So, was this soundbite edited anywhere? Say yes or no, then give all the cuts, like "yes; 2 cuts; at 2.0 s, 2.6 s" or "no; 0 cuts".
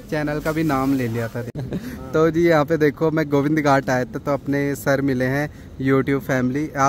yes; 1 cut; at 1.5 s